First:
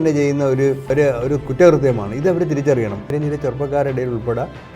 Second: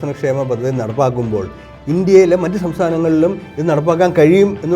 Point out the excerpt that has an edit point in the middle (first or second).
first